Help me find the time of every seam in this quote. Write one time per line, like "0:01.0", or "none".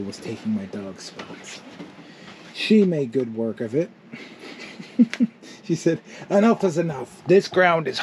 none